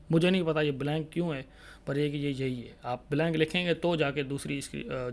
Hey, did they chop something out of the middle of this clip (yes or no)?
no